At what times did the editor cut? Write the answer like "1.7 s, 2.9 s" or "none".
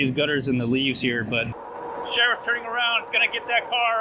1.6 s